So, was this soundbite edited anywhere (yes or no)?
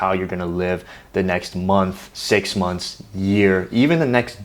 yes